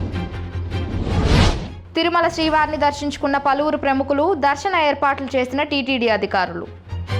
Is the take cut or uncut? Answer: uncut